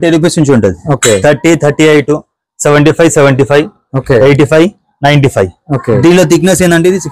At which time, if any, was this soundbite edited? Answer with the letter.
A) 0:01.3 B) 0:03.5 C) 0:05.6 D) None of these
D